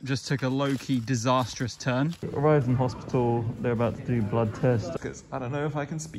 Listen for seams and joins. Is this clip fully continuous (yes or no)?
no